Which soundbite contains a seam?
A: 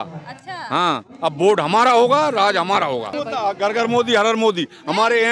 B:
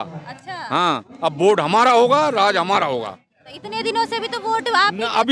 A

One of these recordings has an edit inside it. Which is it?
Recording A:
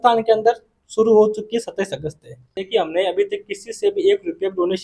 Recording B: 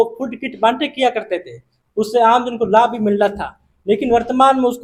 A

